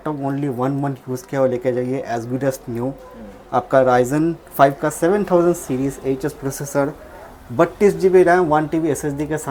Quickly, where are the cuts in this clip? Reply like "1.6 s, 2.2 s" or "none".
none

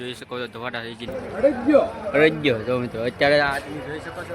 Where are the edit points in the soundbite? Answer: 1.1 s

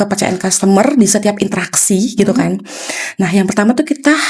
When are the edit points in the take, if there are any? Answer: none

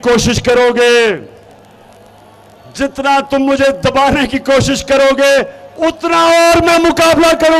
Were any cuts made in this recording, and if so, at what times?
none

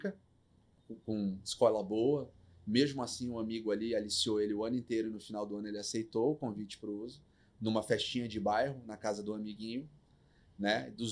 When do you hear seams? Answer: none

